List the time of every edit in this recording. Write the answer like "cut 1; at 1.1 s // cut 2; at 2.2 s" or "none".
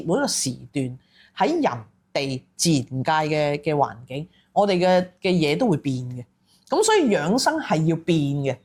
none